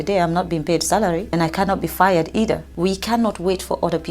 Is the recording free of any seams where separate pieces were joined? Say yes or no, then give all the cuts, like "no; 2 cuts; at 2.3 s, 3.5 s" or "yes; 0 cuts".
no; 2 cuts; at 1.3 s, 2.7 s